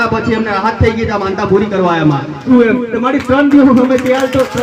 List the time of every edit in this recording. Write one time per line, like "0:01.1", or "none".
0:02.4